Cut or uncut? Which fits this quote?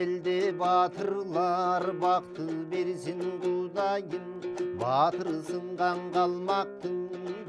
uncut